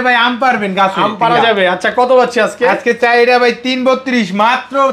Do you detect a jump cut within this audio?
no; 0 cuts

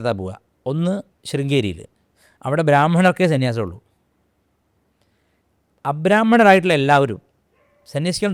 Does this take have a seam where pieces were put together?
yes; 1 cut; at 1.1 s

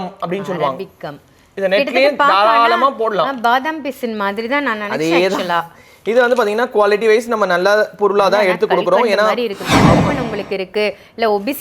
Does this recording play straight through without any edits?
no; 1 cut; at 10.1 s

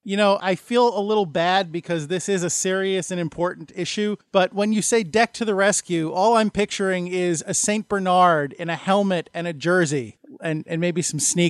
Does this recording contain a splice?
no; 0 cuts

